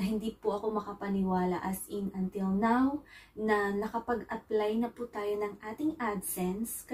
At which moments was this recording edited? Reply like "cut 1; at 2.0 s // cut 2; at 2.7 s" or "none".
none